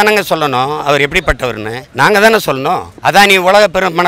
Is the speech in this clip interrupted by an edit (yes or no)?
yes